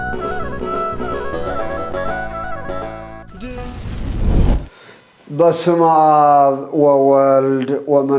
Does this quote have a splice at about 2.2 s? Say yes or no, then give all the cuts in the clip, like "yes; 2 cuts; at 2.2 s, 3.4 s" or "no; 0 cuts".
no; 2 cuts; at 3.9 s, 4.7 s